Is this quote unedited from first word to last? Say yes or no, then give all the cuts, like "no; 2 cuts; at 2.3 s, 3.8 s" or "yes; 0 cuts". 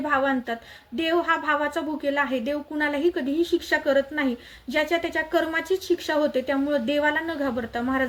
yes; 0 cuts